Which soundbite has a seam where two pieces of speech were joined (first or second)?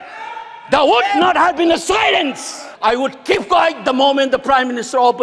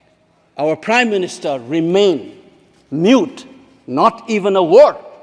first